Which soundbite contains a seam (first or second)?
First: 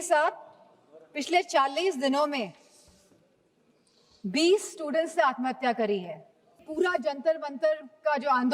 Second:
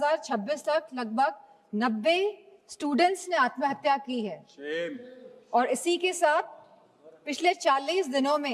first